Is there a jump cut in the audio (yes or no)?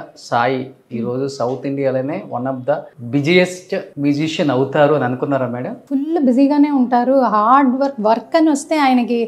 yes